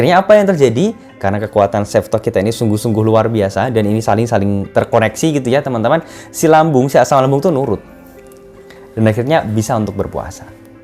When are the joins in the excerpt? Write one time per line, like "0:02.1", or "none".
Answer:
none